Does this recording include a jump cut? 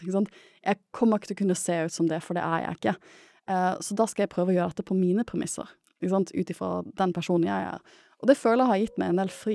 no; 0 cuts

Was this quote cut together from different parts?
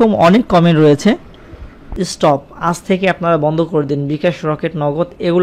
yes; 1 cut; at 1.8 s

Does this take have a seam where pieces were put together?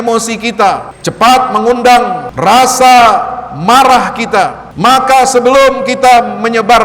yes; 3 cuts; at 1.0 s, 2.2 s, 4.6 s

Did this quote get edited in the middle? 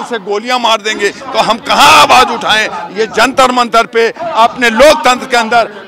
no; 0 cuts

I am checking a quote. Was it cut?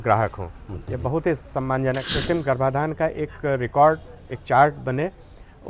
yes; 1 cut; at 2.1 s

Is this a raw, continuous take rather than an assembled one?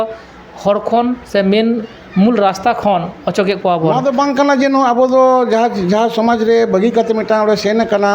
no; 1 cut; at 3.9 s

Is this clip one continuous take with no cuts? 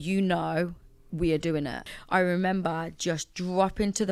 no; 1 cut; at 1.9 s

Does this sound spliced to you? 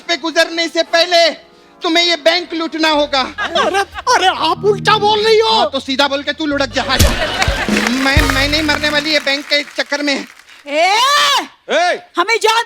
no; 0 cuts

